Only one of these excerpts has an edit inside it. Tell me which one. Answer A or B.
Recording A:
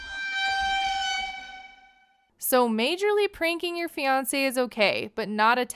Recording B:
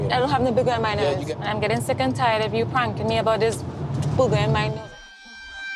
B